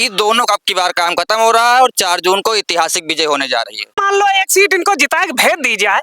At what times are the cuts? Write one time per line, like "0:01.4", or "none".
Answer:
0:04.0